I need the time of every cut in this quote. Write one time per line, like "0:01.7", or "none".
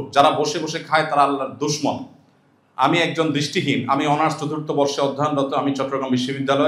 none